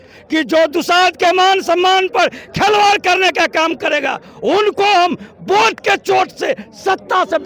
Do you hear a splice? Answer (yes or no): no